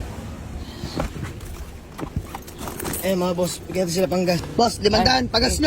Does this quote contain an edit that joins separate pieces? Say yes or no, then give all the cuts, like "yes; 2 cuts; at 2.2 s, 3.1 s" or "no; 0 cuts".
yes; 1 cut; at 4.5 s